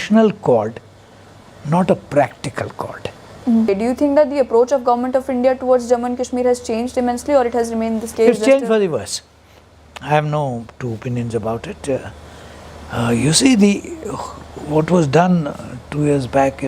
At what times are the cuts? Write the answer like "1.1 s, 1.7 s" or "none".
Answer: 3.7 s, 8.1 s